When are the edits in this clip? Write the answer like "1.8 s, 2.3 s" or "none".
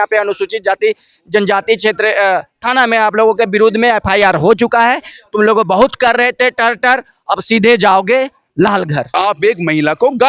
9.1 s